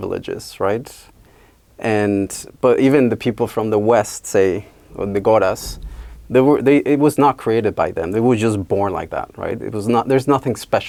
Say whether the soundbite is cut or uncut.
uncut